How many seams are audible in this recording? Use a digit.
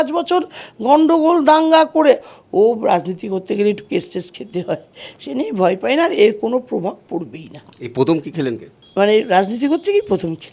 2